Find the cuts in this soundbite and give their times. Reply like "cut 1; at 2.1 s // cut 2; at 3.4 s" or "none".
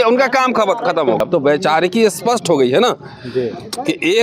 cut 1; at 1.2 s